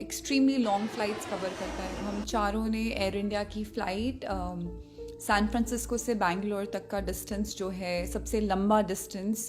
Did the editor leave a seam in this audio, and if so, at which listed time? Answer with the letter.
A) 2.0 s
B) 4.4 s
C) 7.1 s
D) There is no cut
A